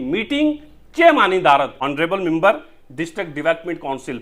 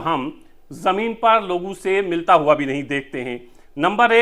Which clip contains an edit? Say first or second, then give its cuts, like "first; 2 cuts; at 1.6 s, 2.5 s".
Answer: first; 1 cut; at 1.8 s